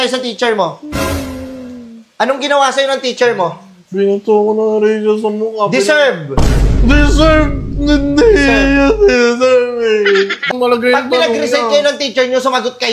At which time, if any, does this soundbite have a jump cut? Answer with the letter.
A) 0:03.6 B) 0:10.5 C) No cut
B